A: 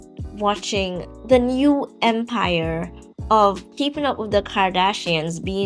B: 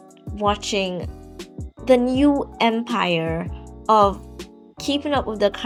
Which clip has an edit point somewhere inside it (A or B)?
A